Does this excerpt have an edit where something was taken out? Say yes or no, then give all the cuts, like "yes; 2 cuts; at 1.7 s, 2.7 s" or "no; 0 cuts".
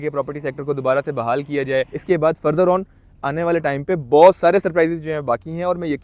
yes; 1 cut; at 1.9 s